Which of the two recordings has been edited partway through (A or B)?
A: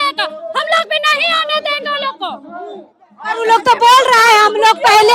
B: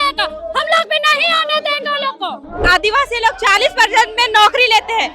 B